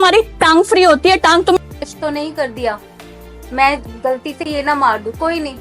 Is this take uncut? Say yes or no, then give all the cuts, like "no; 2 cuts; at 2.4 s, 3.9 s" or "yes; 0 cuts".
no; 1 cut; at 1.6 s